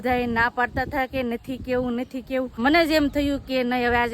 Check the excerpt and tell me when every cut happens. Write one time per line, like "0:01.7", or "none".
0:02.6